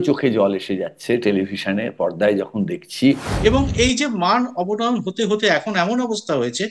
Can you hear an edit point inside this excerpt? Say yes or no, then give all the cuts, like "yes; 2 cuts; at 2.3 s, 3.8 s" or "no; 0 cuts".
yes; 1 cut; at 3.3 s